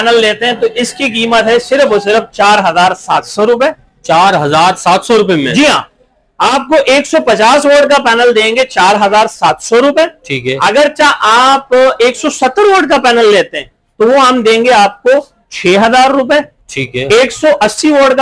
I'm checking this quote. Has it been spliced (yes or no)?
no